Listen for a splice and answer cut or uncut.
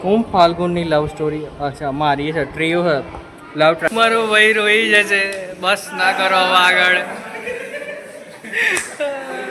cut